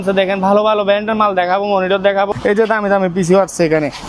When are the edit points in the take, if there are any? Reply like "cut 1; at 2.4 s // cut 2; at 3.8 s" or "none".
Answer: cut 1; at 2.3 s